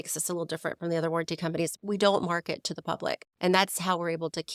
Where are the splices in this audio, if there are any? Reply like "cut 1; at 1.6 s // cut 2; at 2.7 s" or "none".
cut 1; at 1.7 s // cut 2; at 3.3 s